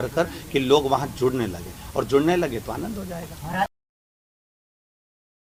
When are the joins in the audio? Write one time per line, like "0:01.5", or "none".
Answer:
none